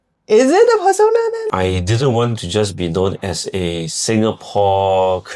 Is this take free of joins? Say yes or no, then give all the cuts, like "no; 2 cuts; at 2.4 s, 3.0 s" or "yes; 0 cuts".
no; 1 cut; at 1.5 s